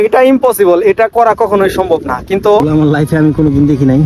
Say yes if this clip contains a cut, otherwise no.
yes